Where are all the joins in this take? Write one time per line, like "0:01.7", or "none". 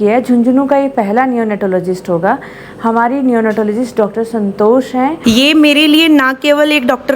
0:05.2